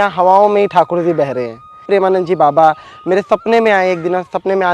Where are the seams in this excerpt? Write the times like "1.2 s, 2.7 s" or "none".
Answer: 1.8 s